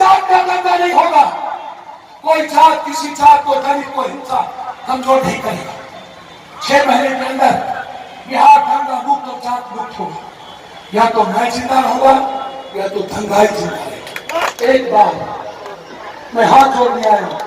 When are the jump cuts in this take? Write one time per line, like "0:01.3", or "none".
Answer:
0:14.5